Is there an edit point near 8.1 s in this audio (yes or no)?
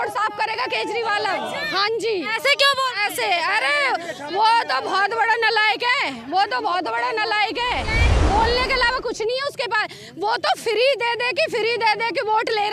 yes